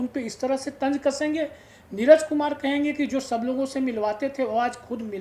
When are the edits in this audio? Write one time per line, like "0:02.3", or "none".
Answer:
none